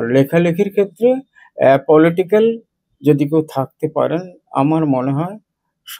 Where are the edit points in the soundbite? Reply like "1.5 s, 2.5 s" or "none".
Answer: none